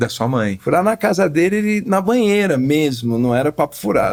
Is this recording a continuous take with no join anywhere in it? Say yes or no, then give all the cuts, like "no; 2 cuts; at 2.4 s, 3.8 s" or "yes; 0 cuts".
yes; 0 cuts